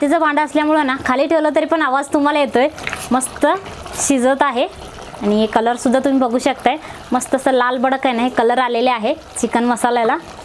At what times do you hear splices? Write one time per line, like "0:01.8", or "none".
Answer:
none